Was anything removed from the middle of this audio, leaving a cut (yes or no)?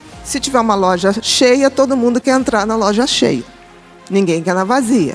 no